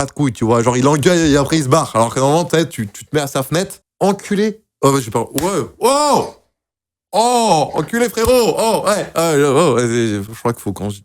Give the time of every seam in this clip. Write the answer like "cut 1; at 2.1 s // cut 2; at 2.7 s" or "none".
none